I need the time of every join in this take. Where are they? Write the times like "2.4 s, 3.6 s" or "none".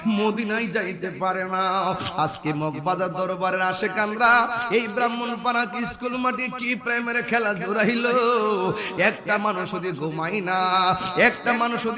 none